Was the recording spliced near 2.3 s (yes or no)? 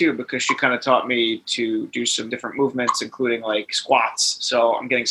yes